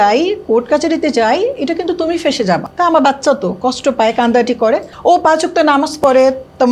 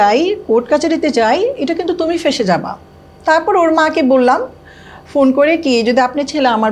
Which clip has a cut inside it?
first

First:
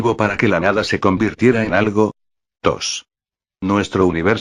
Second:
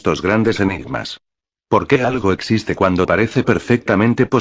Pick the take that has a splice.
first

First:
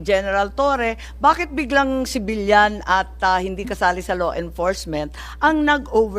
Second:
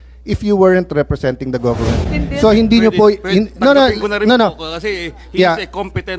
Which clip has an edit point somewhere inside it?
second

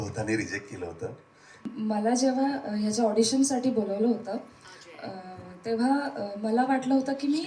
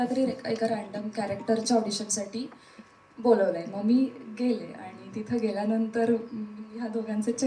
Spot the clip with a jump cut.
first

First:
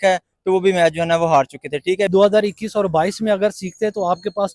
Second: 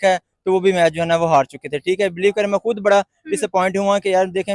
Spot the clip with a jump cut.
first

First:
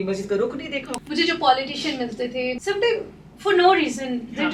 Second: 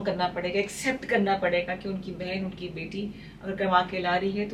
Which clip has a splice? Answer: first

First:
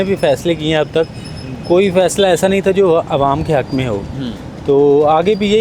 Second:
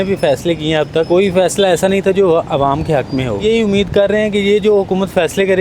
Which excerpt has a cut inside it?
second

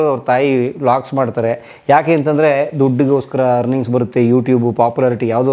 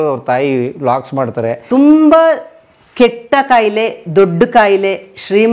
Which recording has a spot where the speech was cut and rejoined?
second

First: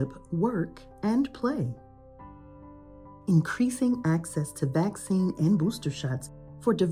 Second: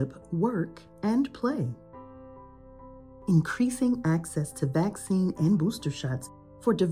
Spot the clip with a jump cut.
second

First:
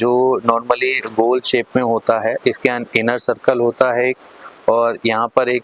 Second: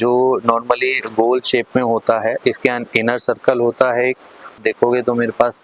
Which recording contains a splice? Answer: second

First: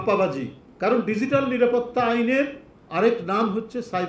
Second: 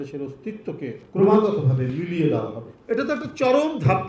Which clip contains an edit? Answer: second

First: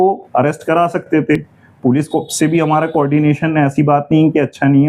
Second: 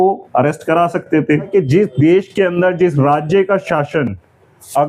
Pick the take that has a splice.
second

